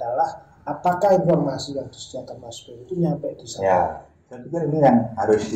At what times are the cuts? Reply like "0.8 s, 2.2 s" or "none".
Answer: 4.5 s